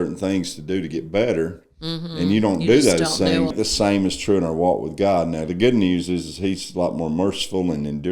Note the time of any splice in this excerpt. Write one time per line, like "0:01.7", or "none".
0:03.5